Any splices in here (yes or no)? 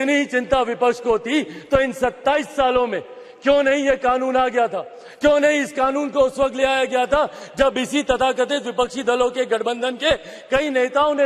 no